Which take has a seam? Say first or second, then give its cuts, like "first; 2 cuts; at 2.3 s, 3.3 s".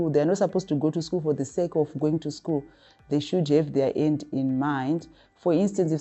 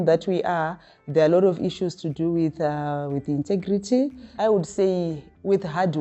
second; 1 cut; at 4.2 s